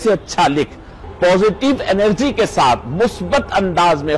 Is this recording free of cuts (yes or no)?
no